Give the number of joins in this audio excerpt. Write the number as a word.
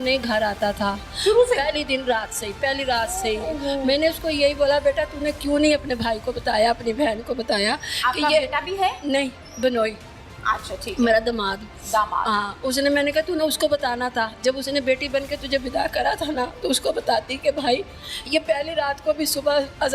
zero